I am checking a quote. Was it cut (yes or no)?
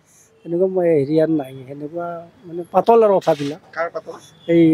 no